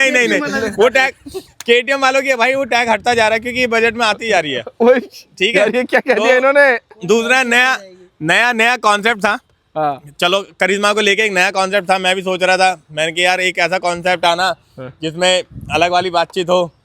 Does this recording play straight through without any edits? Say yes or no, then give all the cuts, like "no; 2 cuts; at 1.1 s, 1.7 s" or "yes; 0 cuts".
yes; 0 cuts